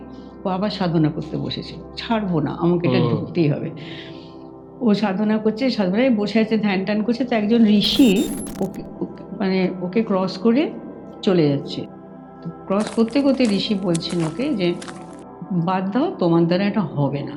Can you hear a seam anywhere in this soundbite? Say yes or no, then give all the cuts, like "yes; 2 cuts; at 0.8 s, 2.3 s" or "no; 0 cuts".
no; 0 cuts